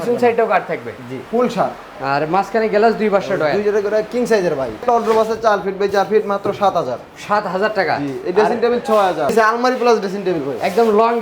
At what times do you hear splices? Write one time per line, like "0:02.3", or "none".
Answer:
0:01.2
0:04.8
0:09.3

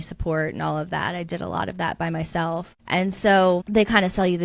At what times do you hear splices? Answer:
0:02.8
0:03.6

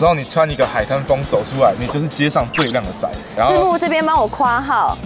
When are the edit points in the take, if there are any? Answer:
0:03.2

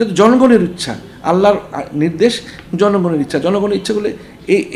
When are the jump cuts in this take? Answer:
none

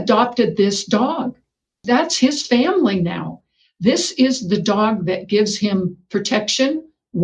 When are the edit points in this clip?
0:01.8

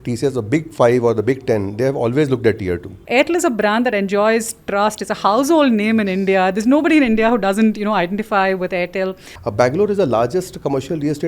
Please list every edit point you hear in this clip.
0:02.9
0:09.3

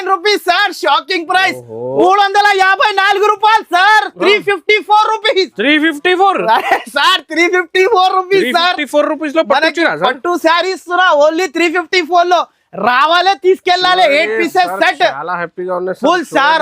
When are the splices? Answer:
0:02.0

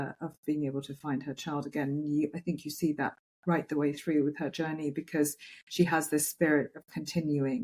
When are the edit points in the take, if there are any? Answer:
none

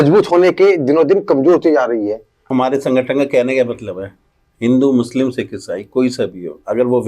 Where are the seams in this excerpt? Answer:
0:02.5

